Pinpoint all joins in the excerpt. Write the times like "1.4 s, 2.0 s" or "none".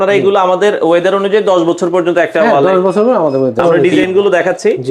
3.8 s